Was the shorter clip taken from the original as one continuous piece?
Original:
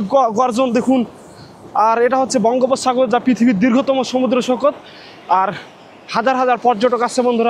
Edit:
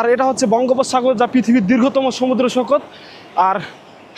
yes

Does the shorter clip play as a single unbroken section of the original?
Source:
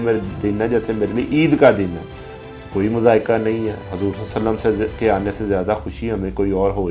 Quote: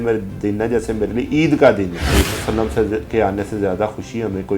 no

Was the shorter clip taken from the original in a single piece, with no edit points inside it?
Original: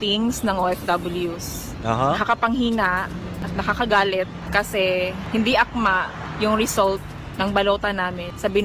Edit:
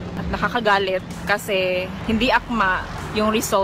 yes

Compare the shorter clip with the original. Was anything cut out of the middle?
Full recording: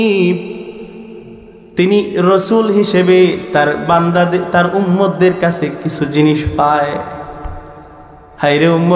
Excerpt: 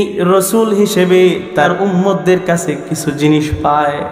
yes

